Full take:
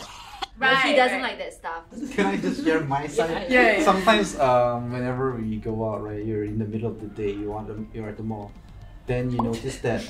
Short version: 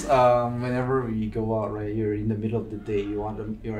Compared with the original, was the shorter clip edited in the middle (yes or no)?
no